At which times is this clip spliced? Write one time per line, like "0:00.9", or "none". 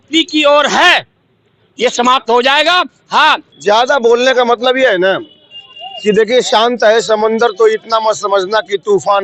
0:03.5